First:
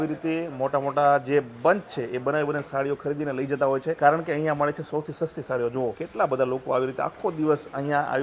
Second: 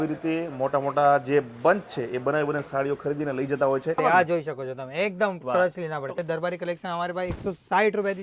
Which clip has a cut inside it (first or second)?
second